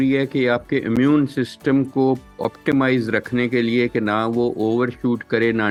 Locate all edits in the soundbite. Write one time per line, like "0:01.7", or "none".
none